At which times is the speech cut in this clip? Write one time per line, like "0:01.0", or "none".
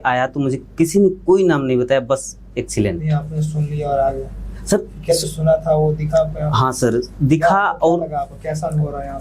none

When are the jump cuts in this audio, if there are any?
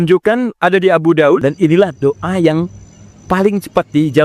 0:01.4

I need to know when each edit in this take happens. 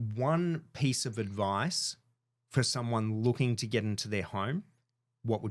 none

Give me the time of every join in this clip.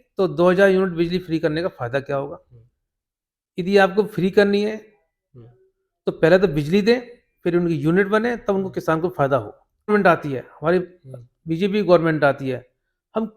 0:09.9

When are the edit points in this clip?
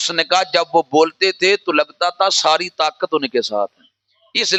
none

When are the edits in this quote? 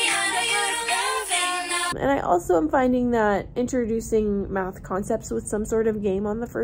0:01.9

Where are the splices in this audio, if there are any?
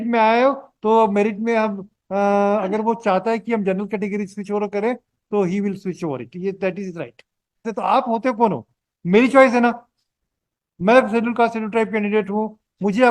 0:07.7

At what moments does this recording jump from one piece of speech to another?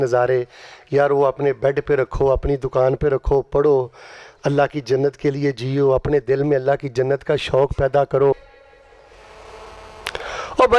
0:08.3

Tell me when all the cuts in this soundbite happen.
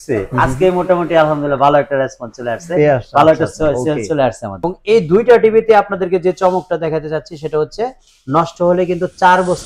0:04.6

